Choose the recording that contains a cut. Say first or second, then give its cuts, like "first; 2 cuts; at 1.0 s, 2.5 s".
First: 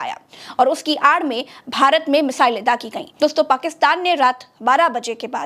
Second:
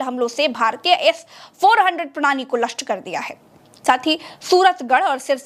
first; 1 cut; at 3.0 s